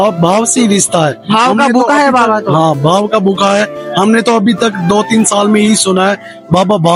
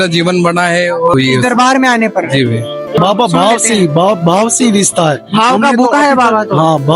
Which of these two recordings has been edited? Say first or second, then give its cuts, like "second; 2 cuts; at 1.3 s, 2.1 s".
second; 2 cuts; at 1.1 s, 3.0 s